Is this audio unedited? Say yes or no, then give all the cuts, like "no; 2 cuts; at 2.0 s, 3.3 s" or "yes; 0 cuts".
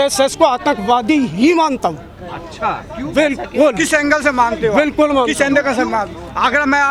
yes; 0 cuts